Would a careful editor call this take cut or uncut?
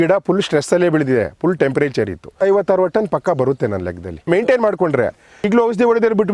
cut